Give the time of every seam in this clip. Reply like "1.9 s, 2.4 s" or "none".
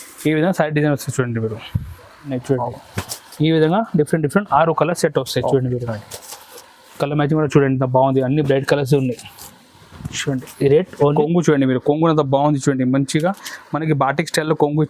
2.3 s, 11.1 s